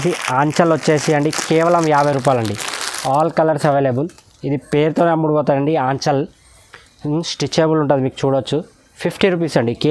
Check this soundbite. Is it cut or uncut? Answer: uncut